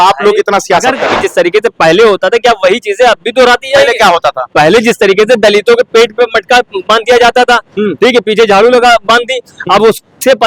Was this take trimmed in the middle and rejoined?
yes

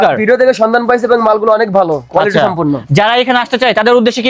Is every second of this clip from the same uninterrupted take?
yes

